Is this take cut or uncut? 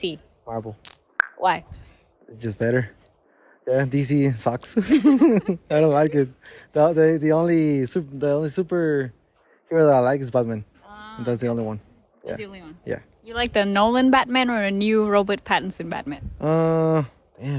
uncut